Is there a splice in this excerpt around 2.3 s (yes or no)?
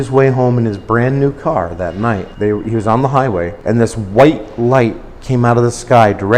yes